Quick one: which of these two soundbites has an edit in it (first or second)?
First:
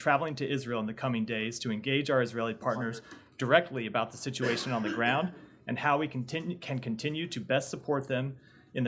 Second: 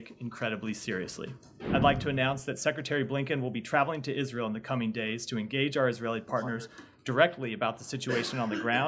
second